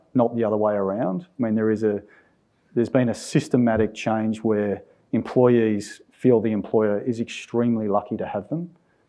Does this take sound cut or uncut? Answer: cut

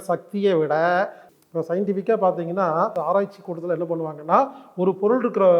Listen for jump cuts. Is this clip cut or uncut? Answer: cut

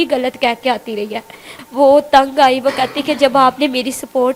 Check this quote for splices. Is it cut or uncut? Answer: cut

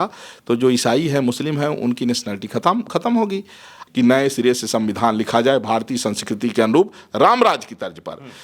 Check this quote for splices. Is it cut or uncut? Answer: cut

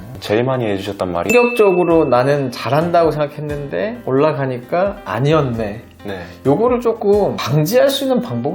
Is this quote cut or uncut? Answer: cut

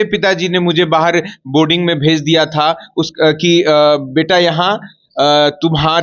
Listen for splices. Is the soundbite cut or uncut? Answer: uncut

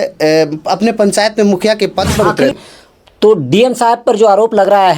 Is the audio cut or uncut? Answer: cut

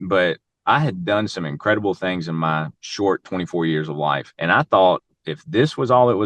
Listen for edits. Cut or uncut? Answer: cut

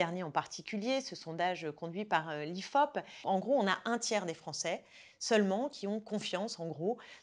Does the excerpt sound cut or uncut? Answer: cut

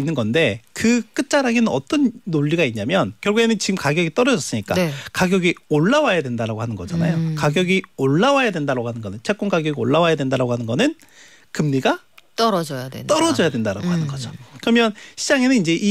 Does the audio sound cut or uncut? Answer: uncut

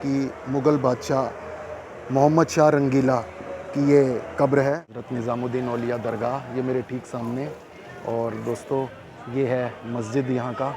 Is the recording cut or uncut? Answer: cut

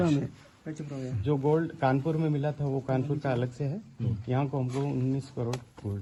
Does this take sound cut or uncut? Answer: uncut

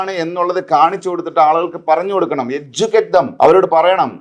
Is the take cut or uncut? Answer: cut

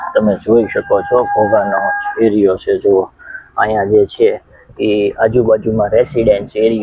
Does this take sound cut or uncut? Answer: uncut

